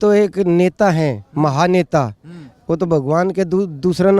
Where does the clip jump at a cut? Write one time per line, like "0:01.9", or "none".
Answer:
none